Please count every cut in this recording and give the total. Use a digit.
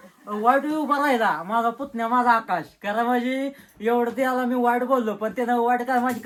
0